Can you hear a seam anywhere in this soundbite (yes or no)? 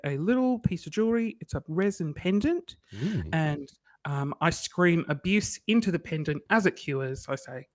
no